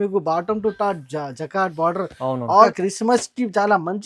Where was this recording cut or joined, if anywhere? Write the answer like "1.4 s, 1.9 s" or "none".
2.7 s